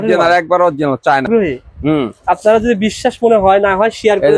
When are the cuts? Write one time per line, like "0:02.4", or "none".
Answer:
0:01.1